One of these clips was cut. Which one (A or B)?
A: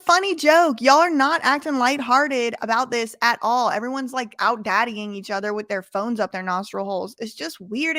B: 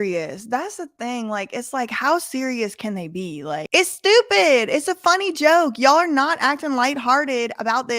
B